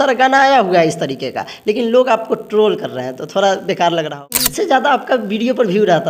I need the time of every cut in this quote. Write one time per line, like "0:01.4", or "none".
0:04.4